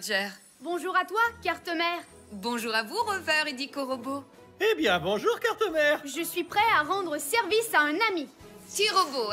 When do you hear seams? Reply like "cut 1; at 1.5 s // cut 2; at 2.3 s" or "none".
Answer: none